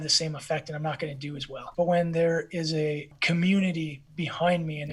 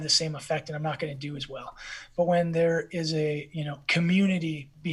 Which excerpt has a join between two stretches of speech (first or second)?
first